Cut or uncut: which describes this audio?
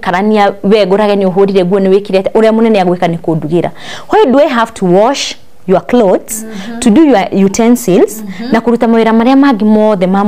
uncut